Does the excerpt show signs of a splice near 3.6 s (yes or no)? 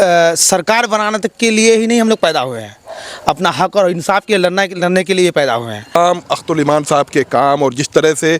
no